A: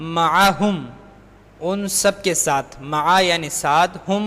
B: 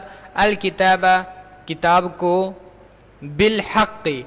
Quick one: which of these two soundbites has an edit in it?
A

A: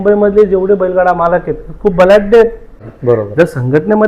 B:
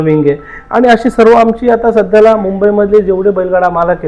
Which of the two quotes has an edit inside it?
A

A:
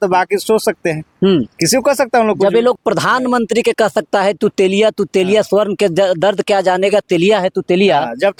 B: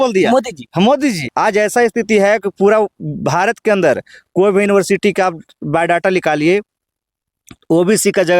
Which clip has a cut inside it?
B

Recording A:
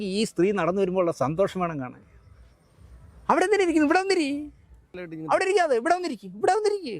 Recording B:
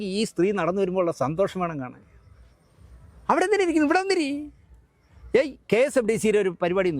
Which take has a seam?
A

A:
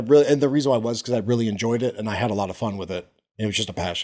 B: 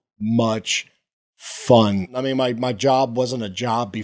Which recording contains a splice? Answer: B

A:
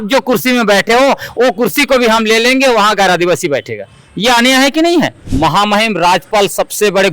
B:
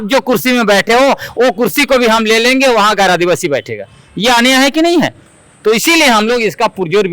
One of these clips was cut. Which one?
A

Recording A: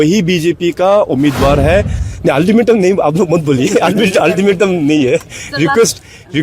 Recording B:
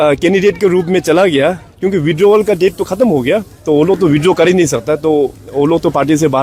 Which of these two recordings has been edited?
A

